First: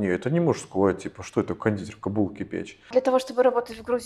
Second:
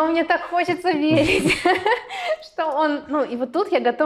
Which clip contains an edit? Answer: first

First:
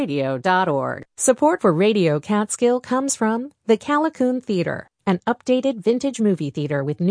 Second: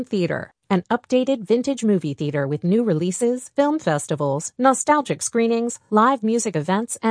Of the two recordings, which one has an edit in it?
first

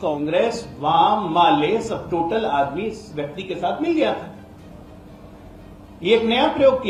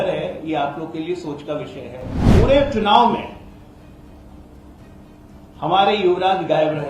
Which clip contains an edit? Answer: second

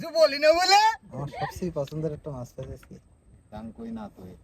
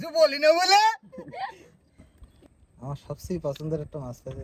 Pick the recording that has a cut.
first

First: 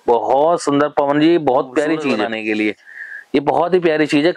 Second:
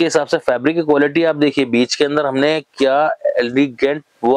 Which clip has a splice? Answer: first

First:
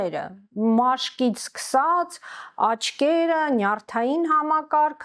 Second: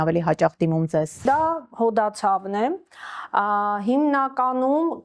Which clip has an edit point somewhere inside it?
second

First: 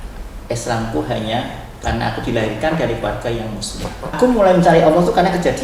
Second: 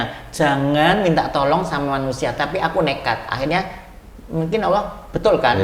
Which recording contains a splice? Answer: first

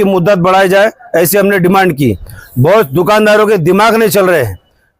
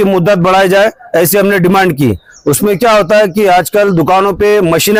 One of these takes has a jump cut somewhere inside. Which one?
first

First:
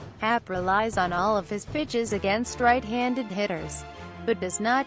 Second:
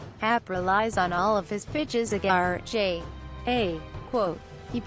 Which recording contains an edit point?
first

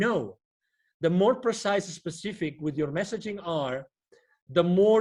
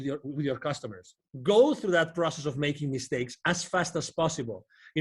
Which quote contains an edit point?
second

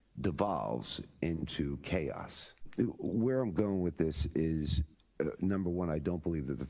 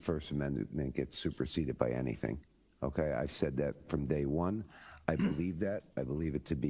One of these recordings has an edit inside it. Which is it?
first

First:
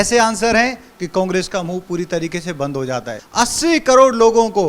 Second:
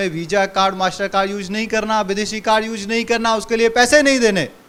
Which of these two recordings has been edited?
first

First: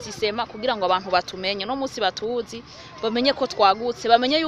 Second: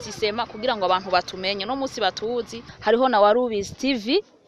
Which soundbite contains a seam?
second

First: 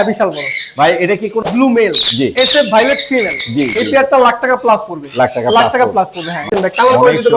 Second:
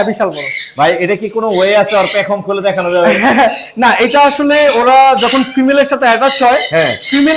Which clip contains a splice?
first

